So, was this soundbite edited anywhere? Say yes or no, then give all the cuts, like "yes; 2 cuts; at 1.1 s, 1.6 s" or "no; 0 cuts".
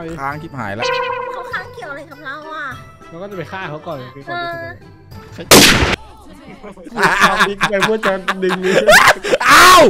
no; 0 cuts